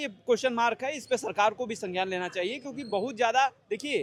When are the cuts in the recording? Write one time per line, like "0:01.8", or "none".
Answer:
none

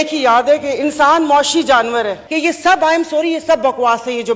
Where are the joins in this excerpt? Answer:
0:02.2

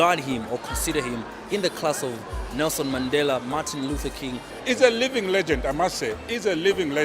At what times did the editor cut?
0:04.5

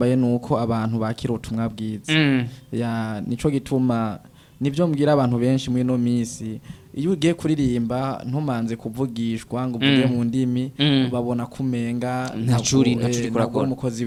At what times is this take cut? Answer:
none

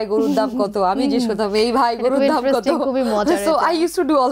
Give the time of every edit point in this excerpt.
none

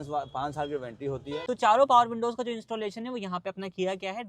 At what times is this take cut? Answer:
0:01.3

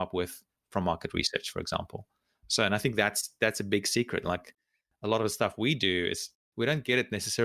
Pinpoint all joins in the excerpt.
0:06.4

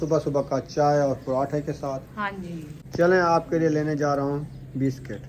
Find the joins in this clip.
0:02.7

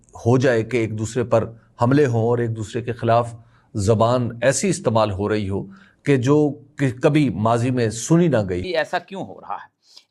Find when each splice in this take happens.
0:08.7

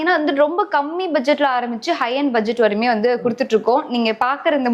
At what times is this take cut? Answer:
none

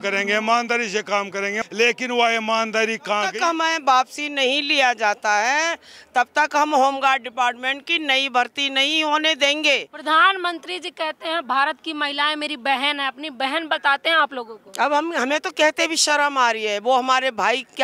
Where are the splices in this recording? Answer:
0:01.6
0:03.3
0:09.9

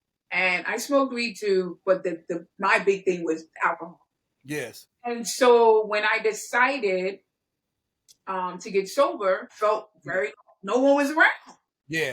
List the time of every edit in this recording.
0:09.5

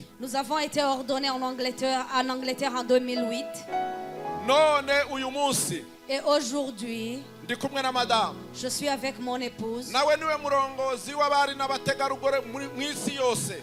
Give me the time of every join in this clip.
none

